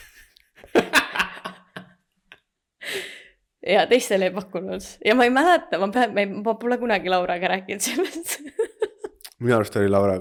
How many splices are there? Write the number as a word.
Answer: zero